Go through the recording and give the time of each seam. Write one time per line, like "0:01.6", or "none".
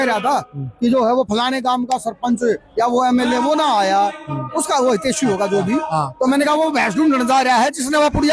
none